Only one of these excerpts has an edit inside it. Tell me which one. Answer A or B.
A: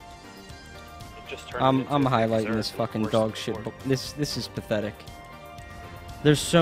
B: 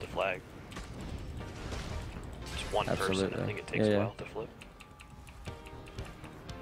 A